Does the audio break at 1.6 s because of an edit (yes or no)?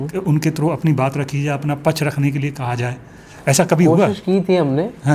no